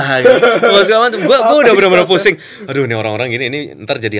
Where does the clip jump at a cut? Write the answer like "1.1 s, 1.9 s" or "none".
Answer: none